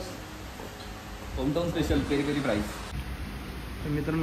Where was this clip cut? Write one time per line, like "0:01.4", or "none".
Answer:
0:02.8